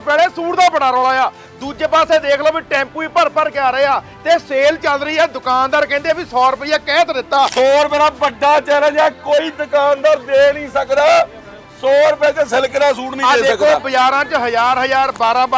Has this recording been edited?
yes; 1 cut; at 7.5 s

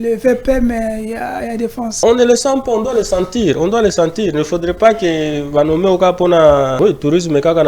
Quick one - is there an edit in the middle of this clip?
yes; 2 cuts; at 1.9 s, 6.7 s

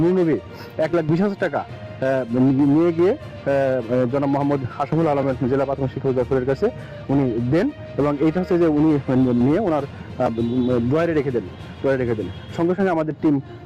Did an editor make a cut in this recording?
no; 0 cuts

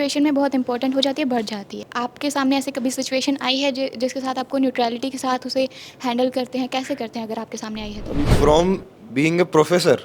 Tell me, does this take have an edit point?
yes; 2 cuts; at 1.9 s, 8.3 s

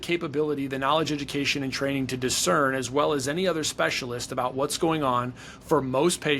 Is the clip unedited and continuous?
yes; 0 cuts

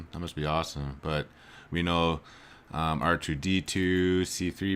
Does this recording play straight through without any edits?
yes; 0 cuts

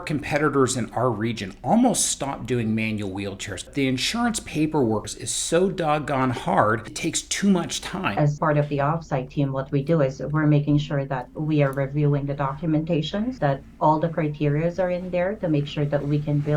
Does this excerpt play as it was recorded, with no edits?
no; 5 cuts; at 3.7 s, 5.1 s, 6.9 s, 8.2 s, 13.3 s

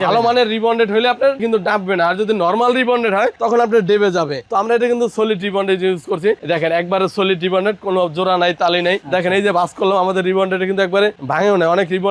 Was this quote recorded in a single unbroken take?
yes; 0 cuts

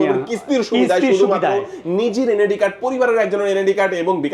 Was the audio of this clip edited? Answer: no; 0 cuts

